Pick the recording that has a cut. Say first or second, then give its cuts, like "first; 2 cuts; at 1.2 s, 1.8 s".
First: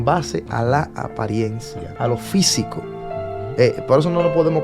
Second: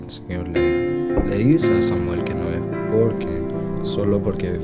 first; 1 cut; at 1.9 s